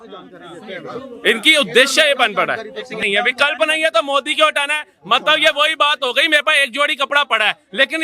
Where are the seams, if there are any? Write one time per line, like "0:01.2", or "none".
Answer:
0:03.0

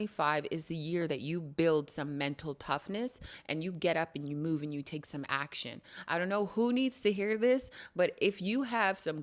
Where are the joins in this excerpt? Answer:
none

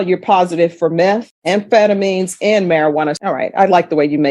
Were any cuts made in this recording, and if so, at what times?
0:03.2

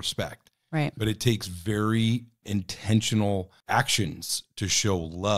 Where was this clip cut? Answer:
0:02.4
0:03.6

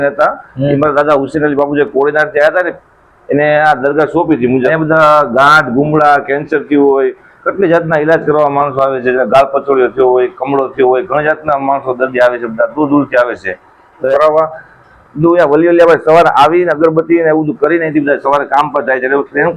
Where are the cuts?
0:04.7
0:14.1

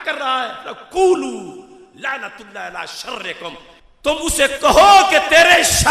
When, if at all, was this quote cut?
none

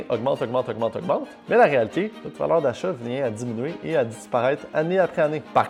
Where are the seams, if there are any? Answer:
none

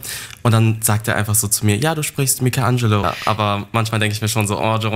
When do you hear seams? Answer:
0:03.0

